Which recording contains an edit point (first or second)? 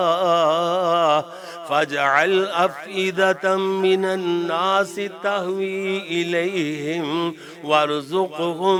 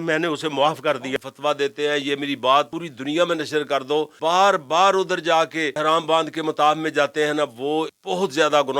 second